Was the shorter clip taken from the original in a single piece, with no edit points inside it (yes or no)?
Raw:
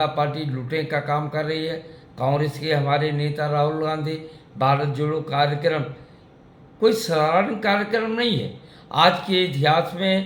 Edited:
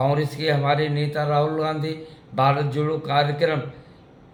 yes